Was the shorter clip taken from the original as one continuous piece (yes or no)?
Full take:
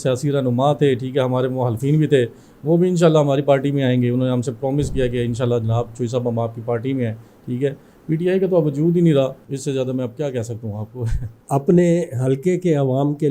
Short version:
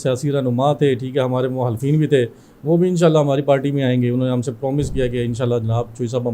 yes